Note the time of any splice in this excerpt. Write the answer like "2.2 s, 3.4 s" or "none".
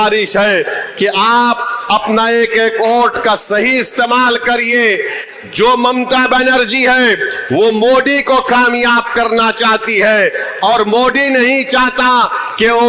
none